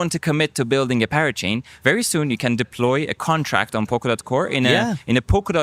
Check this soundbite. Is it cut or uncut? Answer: uncut